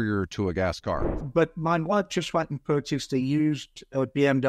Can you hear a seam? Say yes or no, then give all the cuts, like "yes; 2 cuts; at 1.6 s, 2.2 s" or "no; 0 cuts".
yes; 1 cut; at 1.2 s